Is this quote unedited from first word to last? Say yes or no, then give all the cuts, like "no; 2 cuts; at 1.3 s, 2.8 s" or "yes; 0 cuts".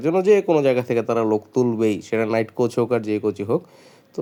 yes; 0 cuts